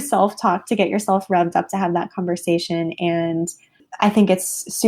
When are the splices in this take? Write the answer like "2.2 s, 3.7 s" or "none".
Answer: none